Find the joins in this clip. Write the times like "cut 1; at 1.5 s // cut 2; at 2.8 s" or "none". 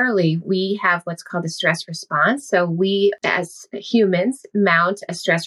cut 1; at 3.2 s